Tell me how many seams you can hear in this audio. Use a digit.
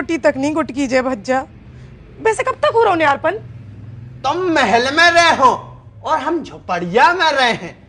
1